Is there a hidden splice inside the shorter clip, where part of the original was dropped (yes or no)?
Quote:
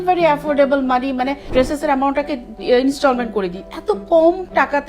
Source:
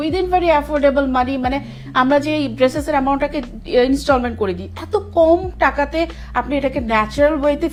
yes